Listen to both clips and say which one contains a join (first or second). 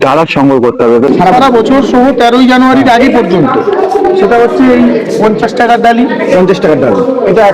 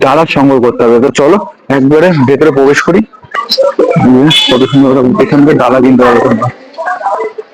first